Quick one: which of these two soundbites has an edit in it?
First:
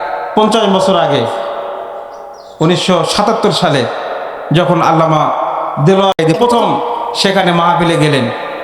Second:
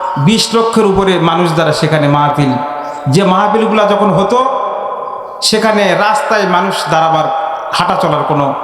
first; 1 cut; at 6.2 s

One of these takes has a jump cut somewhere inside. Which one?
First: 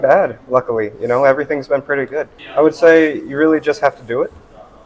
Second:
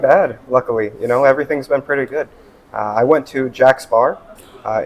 first; 1 cut; at 2.4 s

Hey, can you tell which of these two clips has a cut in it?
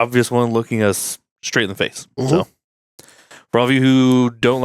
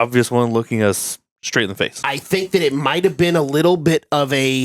second; 1 cut; at 2.0 s

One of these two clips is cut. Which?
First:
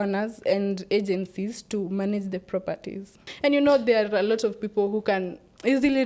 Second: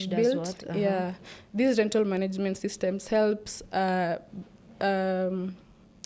first; 1 cut; at 3.2 s

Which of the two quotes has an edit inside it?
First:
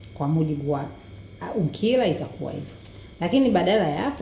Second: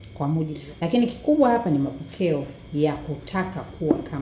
second; 1 cut; at 1.2 s

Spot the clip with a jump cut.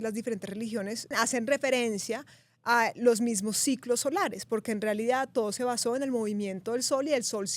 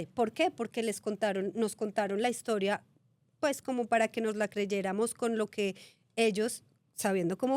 first; 1 cut; at 1.1 s

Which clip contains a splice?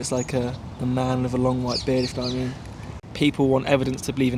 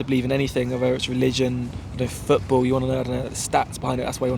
first; 1 cut; at 3.0 s

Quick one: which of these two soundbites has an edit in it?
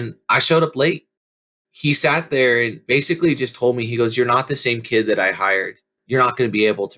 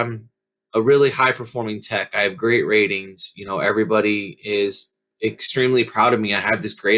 first; 3 cuts; at 1.1 s, 2.8 s, 5.9 s

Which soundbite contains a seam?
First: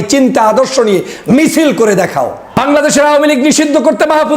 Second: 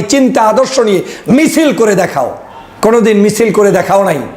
first; 1 cut; at 2.6 s

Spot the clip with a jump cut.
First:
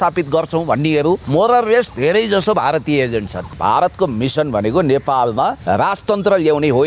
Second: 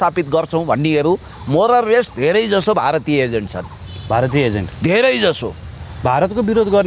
first; 3 cuts; at 1.2 s, 3.5 s, 5.6 s

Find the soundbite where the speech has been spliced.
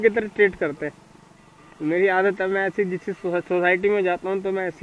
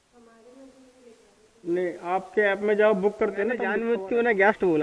second; 1 cut; at 3.7 s

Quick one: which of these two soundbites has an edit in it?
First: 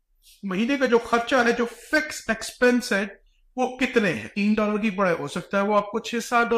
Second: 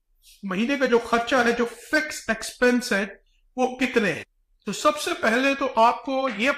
first; 1 cut; at 4.3 s

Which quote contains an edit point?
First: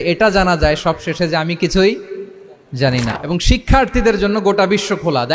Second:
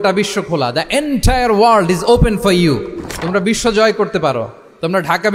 first; 1 cut; at 3.1 s

